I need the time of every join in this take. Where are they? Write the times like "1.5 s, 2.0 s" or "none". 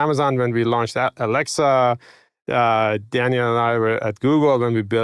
none